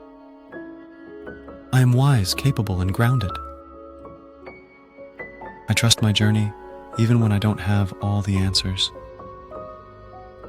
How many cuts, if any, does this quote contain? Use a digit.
4